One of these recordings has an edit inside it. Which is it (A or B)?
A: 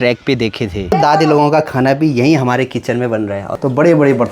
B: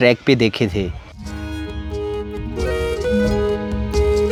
A